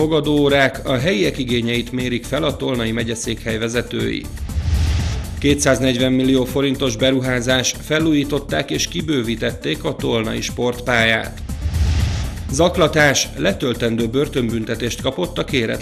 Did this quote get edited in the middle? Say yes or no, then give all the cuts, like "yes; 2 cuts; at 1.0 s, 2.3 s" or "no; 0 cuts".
no; 0 cuts